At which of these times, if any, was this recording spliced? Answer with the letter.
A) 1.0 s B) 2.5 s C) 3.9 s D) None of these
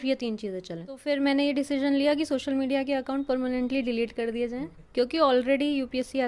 A